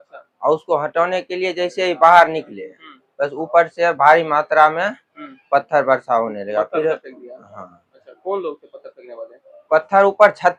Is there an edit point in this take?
no; 0 cuts

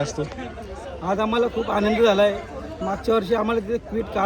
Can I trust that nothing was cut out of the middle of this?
yes; 0 cuts

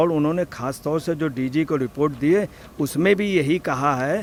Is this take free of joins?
yes; 0 cuts

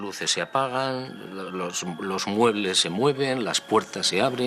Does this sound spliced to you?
no; 0 cuts

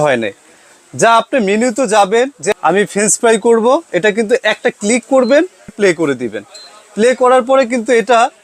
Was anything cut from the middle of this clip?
yes; 2 cuts; at 2.4 s, 5.7 s

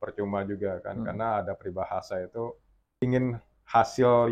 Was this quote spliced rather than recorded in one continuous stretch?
yes; 1 cut; at 3.0 s

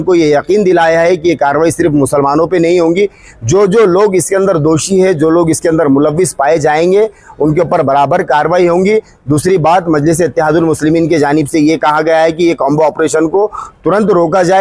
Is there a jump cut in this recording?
no; 0 cuts

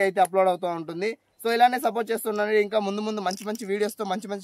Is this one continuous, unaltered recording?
no; 1 cut; at 1.3 s

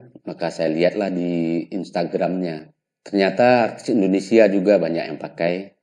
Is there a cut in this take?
no; 0 cuts

